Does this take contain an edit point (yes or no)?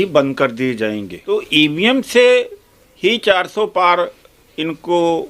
yes